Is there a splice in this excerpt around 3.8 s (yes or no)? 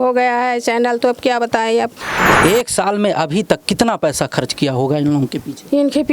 no